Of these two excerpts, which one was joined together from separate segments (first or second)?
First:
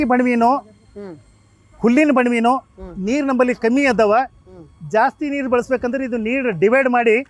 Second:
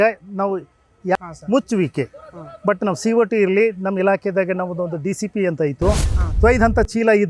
second